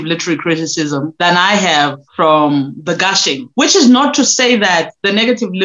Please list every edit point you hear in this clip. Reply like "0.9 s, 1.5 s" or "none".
1.1 s, 2.0 s, 3.4 s

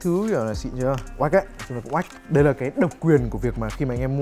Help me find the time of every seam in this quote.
2.2 s

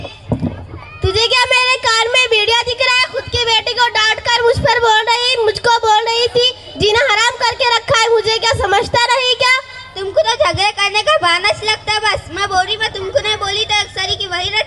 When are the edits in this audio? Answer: none

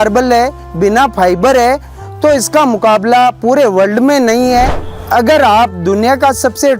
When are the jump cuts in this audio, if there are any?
4.9 s

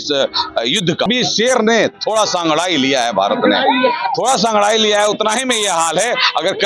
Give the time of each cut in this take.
1.1 s

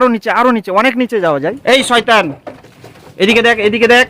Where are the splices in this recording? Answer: 1.6 s

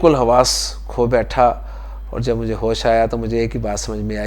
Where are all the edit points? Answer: none

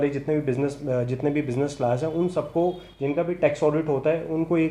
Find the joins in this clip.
none

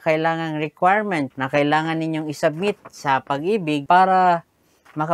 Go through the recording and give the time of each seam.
1.4 s, 3.8 s

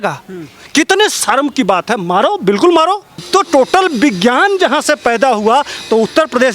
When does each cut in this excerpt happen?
3.2 s

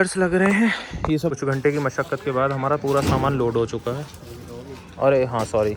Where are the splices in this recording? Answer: 1.3 s

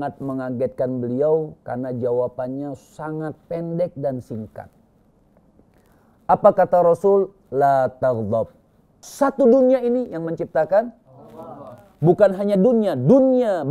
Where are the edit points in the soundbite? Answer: 9.1 s

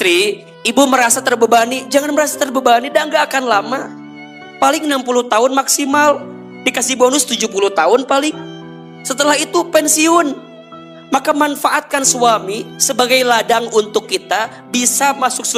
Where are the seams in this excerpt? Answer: none

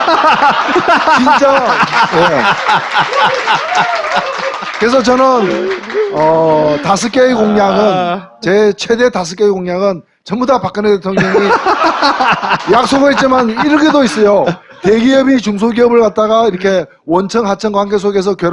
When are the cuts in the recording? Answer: 7.3 s

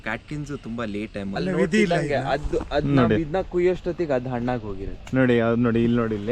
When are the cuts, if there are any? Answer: 1.4 s

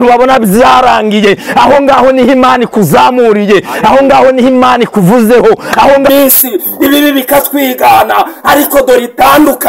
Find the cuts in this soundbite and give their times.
6.1 s

